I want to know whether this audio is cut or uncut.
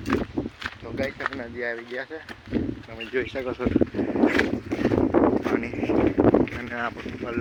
uncut